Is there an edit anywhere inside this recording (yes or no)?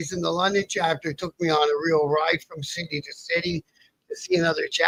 no